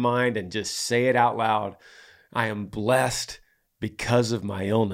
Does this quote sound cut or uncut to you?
uncut